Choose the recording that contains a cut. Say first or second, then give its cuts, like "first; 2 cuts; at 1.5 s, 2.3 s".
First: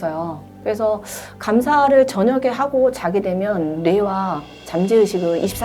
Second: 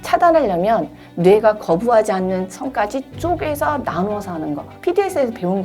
second; 1 cut; at 4.7 s